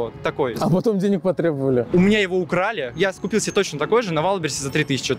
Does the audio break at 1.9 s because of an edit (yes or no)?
no